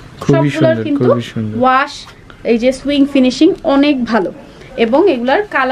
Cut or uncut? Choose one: uncut